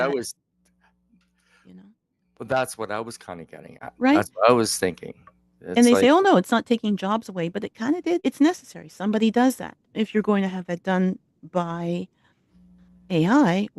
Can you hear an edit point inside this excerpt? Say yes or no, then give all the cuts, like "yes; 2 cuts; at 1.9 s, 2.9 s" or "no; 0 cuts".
yes; 1 cut; at 8.2 s